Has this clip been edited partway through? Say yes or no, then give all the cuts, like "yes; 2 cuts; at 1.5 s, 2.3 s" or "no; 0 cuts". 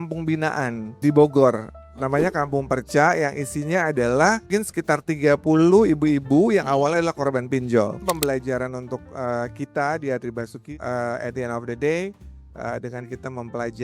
yes; 4 cuts; at 1.0 s, 4.4 s, 8.0 s, 10.7 s